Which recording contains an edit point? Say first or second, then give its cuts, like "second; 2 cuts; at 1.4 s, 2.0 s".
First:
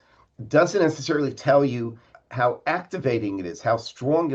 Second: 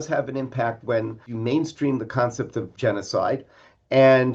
second; 2 cuts; at 1.3 s, 2.7 s